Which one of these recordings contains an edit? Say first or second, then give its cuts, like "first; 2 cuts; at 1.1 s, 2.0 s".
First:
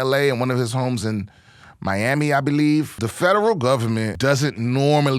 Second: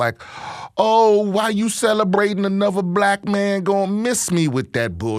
first; 2 cuts; at 3.0 s, 4.1 s